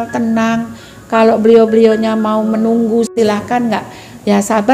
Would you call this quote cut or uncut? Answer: cut